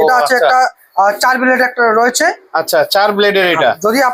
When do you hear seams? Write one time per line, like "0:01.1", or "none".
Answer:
none